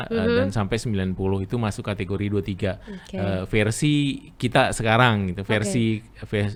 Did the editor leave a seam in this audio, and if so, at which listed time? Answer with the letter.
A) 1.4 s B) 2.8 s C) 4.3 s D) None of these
D